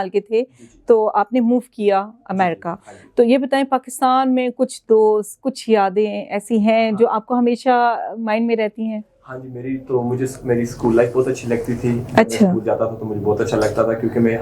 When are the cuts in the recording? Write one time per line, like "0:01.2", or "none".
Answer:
none

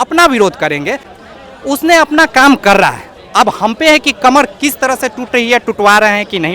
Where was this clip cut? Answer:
0:01.0

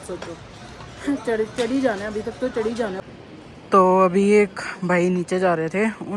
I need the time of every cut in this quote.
0:03.0

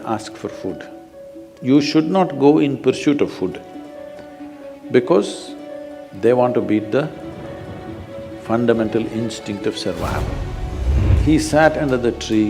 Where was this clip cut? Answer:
0:11.0

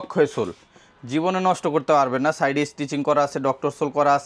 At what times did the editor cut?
none

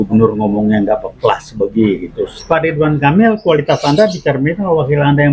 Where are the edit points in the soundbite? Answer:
0:02.4

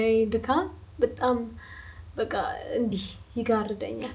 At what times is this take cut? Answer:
none

